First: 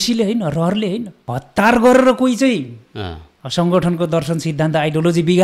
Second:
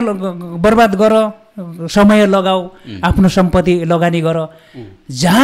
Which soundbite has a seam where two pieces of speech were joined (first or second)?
first